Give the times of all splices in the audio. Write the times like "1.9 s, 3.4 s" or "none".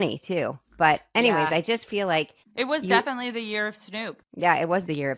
2.4 s, 4.2 s